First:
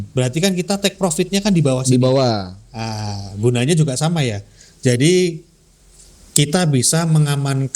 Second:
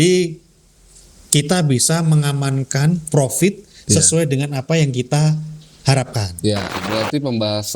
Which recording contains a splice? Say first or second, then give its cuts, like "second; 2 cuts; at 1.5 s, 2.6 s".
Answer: second; 1 cut; at 6.8 s